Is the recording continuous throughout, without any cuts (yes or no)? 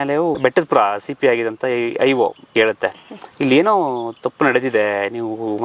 no